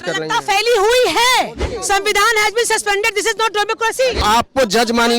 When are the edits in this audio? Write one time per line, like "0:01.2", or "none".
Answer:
0:01.7
0:04.2